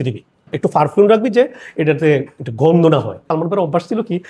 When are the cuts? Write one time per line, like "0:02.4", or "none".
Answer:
0:03.2